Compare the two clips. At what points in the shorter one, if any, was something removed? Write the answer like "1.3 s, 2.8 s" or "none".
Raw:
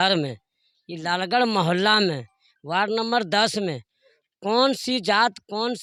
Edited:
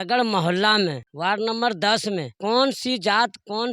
1.1 s, 2.3 s

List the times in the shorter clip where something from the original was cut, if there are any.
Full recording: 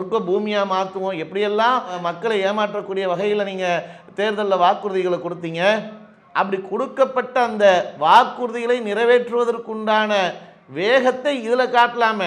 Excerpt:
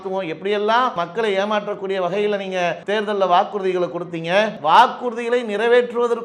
0.9 s, 2.8 s, 4.6 s

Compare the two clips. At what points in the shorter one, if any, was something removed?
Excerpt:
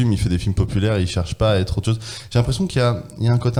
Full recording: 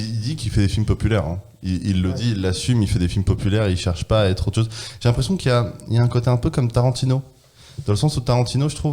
none

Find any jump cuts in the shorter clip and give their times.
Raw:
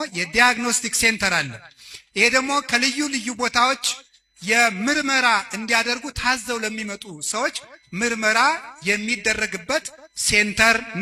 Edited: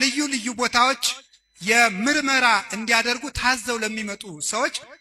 none

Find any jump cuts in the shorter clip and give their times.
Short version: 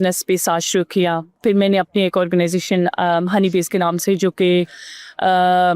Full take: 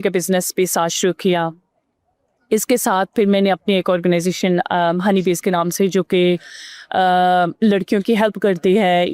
1.4 s

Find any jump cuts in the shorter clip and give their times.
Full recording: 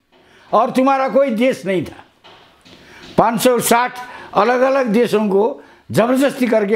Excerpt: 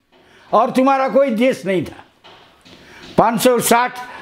none

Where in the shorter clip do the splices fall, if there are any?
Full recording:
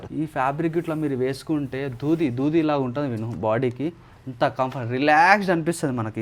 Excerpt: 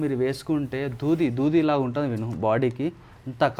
none

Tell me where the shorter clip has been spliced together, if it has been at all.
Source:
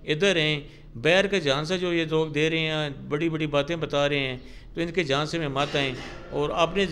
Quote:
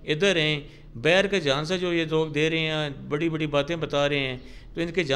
none

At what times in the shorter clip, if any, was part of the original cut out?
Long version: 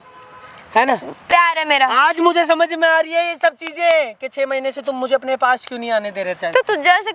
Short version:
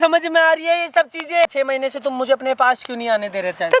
1.5 s

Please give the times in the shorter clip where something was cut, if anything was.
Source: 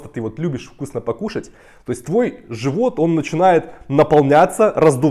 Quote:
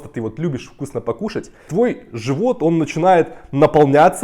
1.7 s

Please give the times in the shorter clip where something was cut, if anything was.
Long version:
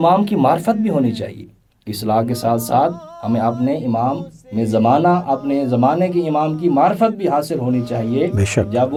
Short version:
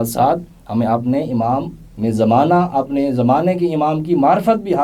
none

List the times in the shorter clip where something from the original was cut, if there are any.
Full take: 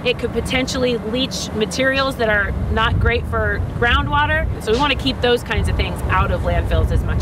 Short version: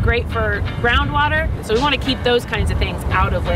none

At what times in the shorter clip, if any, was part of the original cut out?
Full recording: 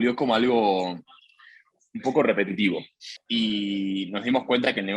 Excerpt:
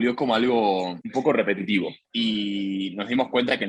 1.0 s, 2.0 s

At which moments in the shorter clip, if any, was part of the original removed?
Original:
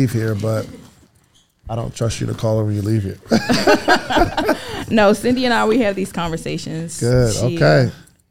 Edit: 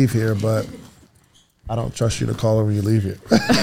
none

